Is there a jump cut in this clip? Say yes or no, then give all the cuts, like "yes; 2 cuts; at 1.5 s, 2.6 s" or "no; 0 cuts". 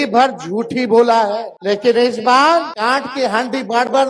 yes; 2 cuts; at 1.5 s, 2.7 s